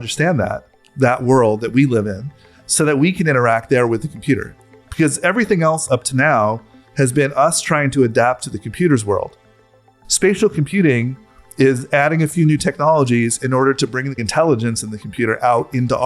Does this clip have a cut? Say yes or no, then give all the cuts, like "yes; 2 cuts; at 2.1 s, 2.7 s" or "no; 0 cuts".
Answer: yes; 2 cuts; at 9.7 s, 14.2 s